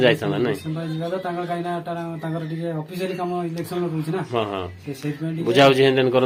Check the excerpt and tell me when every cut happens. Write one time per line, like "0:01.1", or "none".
none